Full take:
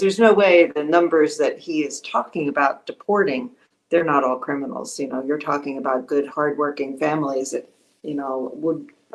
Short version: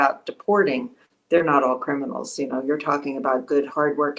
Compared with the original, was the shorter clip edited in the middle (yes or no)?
no